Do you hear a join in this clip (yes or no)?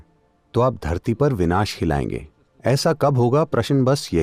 no